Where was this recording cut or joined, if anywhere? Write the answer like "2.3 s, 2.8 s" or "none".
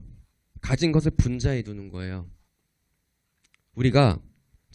3.1 s